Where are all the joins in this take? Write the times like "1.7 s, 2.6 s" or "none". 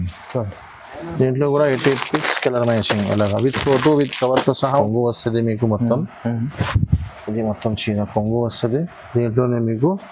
4.8 s